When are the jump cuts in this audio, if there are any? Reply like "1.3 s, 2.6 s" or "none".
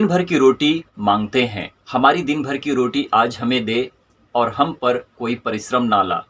0.9 s